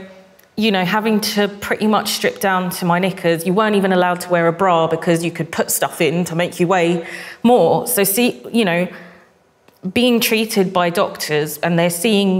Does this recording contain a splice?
no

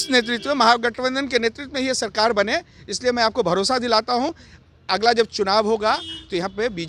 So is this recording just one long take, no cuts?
yes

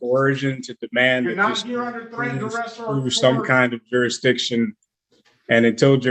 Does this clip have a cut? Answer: no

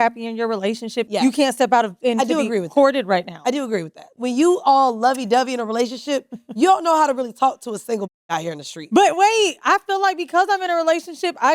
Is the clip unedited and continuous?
no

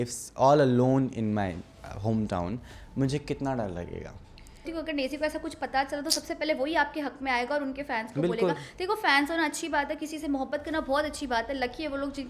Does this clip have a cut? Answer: yes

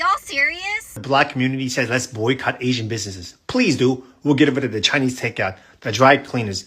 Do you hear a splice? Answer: yes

